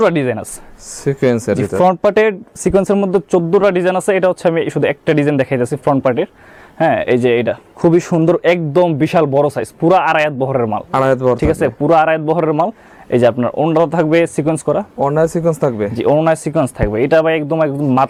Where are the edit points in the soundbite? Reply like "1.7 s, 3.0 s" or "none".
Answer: none